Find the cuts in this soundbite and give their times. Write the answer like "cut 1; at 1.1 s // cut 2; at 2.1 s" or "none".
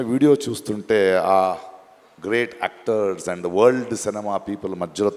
none